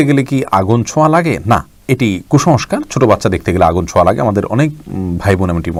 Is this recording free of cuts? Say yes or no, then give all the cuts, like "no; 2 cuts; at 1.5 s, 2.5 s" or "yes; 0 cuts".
yes; 0 cuts